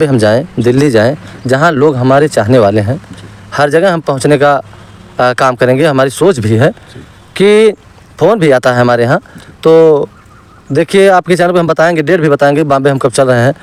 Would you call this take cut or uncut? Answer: uncut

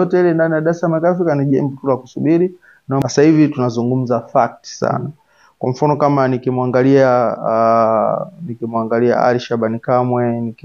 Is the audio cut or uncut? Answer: cut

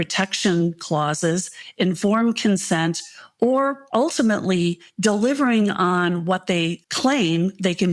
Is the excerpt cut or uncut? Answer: cut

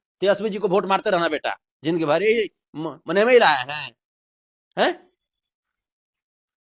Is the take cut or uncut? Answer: uncut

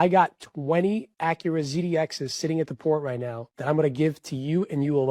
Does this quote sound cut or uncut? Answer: uncut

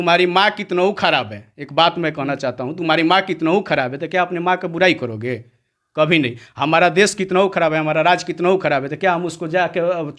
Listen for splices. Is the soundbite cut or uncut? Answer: uncut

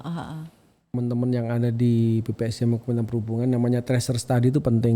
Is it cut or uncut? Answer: cut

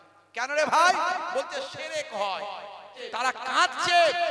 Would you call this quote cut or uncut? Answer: cut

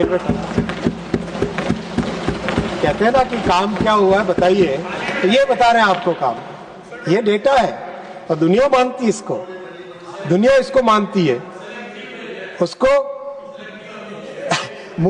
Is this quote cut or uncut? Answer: uncut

